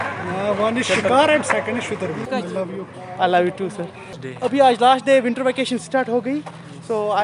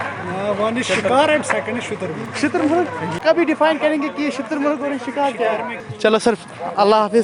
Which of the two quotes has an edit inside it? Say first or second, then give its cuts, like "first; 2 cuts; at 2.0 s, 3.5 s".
first; 2 cuts; at 2.3 s, 4.2 s